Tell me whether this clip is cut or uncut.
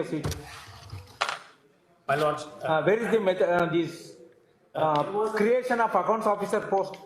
uncut